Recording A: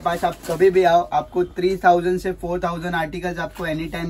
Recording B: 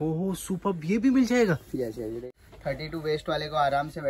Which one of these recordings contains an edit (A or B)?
B